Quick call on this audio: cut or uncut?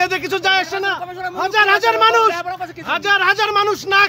uncut